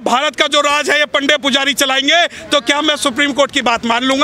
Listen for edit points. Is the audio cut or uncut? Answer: uncut